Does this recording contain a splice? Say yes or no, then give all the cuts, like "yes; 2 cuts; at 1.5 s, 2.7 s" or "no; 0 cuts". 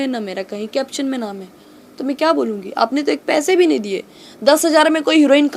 no; 0 cuts